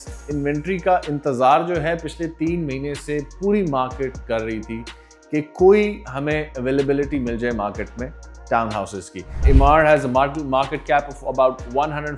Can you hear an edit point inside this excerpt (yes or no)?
yes